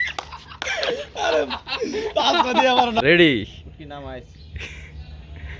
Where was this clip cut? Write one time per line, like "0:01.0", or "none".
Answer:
0:03.0